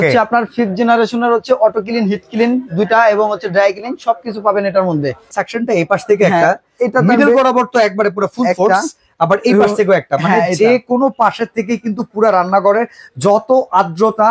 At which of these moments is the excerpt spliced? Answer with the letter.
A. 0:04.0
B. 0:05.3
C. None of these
B